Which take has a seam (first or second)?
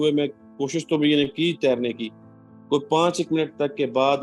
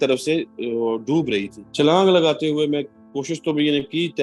second